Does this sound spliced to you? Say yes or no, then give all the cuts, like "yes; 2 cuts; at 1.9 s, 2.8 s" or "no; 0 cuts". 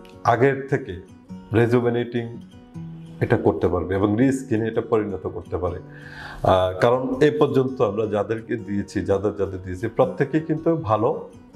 no; 0 cuts